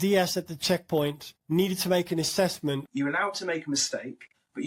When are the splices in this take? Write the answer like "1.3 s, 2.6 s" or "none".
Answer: 2.8 s

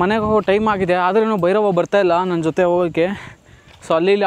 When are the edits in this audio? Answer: none

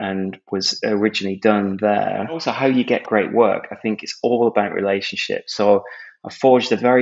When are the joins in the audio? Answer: 2.5 s

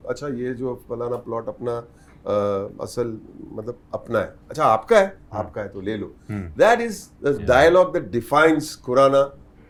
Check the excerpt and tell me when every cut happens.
none

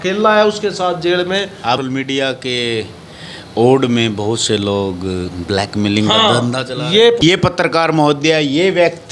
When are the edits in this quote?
1.7 s, 7.2 s

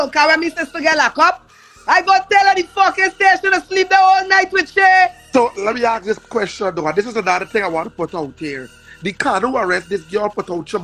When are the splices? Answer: none

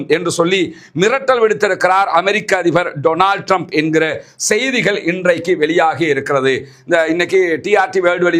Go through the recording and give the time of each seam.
none

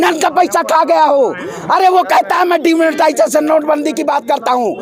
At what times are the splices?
none

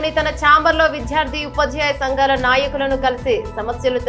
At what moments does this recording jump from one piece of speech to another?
none

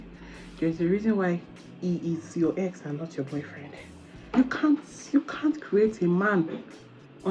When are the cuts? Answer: 4.2 s

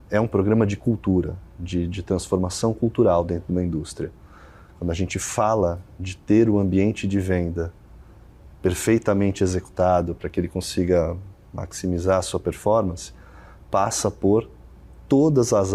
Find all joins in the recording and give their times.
none

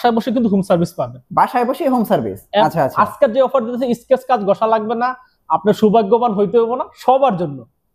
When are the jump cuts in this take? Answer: 2.6 s

